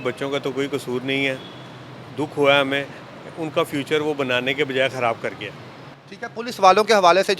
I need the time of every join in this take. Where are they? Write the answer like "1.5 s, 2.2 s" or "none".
none